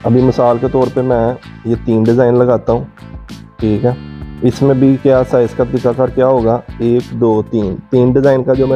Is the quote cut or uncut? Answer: uncut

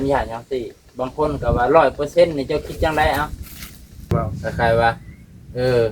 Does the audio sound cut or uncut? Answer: cut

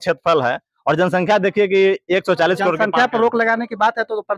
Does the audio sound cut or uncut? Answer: uncut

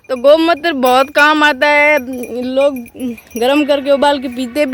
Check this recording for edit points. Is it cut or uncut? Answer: uncut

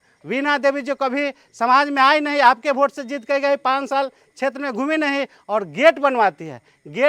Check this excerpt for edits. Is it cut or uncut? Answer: uncut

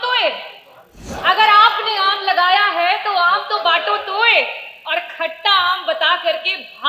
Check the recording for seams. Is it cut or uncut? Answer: cut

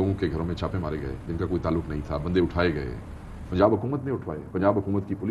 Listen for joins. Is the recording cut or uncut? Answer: uncut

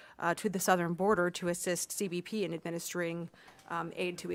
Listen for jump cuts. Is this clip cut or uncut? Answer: uncut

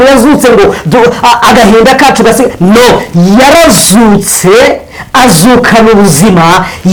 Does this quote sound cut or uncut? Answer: uncut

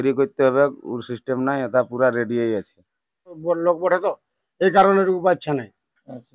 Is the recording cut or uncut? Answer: cut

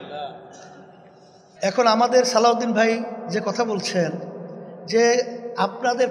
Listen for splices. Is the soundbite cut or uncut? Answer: cut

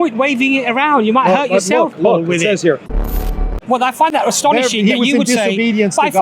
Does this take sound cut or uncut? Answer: cut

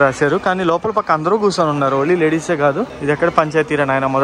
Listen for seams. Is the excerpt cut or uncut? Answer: cut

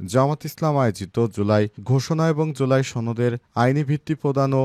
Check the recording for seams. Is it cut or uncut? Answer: uncut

